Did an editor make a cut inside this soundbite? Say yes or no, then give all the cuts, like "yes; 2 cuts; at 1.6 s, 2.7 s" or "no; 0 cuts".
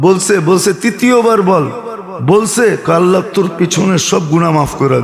no; 0 cuts